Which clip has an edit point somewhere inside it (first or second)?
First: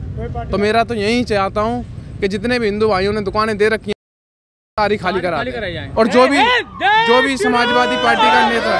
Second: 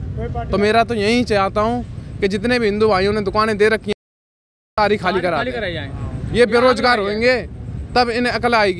first